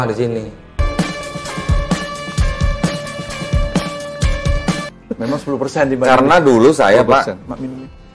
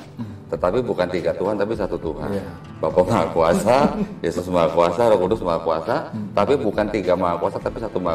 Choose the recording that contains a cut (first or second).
first